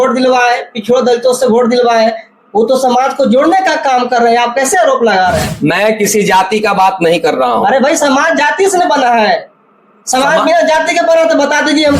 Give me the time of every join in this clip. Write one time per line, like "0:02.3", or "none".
none